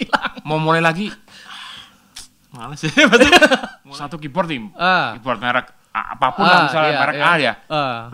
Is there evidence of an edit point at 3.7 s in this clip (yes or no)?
yes